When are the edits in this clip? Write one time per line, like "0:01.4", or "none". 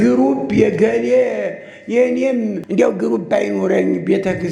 0:02.6